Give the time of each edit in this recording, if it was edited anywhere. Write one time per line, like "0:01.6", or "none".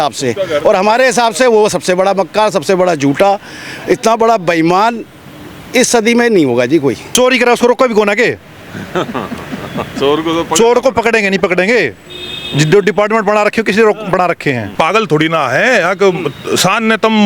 0:07.1
0:14.7